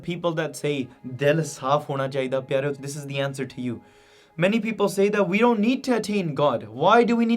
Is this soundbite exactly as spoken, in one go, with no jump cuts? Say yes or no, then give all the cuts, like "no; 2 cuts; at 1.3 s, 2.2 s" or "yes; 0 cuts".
no; 1 cut; at 2.8 s